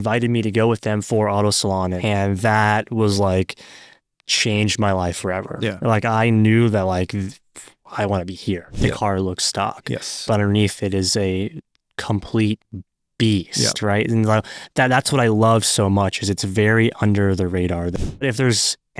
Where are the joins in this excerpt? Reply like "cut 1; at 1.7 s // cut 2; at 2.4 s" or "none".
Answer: cut 1; at 2.0 s // cut 2; at 8.8 s // cut 3; at 18.0 s